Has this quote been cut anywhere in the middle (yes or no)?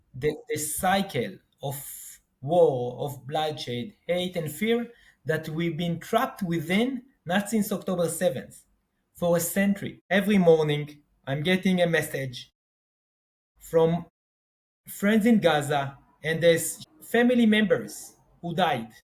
yes